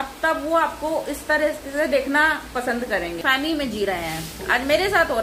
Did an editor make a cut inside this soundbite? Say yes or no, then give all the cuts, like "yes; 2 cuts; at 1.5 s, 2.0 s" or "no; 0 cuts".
yes; 1 cut; at 3.2 s